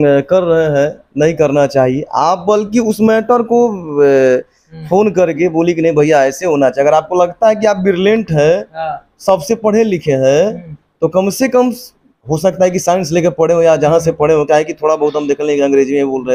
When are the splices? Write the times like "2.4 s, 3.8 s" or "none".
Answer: none

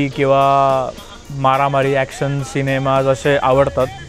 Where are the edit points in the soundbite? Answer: none

